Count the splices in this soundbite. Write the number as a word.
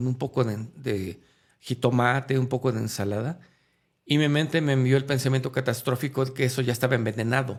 zero